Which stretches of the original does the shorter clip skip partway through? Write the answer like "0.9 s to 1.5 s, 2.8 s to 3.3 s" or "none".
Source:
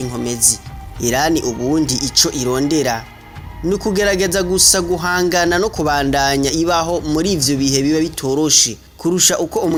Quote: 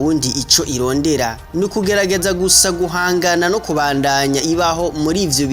3.1 s to 3.5 s